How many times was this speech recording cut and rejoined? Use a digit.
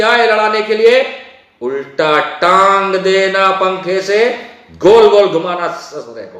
0